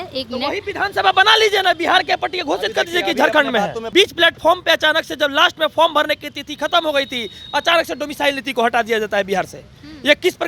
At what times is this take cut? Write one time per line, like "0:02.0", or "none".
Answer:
0:03.8

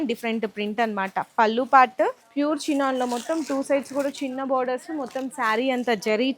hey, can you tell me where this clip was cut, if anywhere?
0:02.2

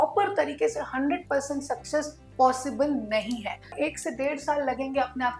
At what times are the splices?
0:03.7

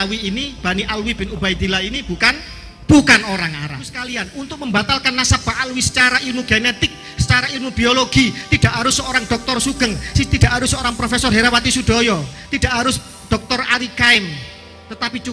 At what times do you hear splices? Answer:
0:04.1

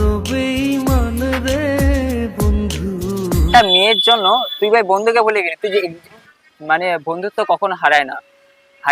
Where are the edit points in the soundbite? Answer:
0:03.5
0:06.3

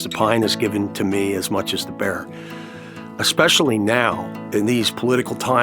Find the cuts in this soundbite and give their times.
0:04.3

